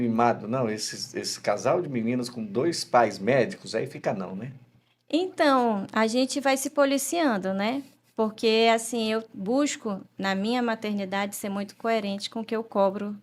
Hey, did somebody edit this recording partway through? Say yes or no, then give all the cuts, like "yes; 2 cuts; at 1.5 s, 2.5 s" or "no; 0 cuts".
no; 0 cuts